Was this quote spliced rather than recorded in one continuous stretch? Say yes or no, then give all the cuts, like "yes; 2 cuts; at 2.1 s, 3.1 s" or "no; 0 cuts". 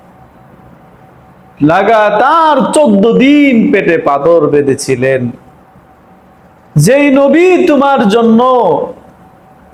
no; 0 cuts